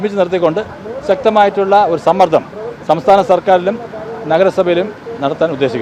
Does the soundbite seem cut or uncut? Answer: uncut